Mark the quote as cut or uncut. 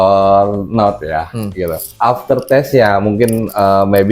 cut